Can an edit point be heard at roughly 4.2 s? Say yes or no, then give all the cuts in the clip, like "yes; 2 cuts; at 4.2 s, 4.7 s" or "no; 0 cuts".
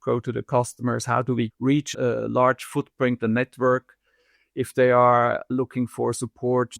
no; 1 cut; at 1.9 s